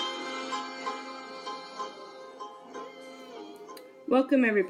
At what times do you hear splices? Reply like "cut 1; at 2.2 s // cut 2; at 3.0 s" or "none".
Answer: none